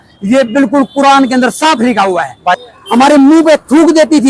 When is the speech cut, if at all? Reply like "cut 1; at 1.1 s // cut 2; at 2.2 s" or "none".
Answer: cut 1; at 2.6 s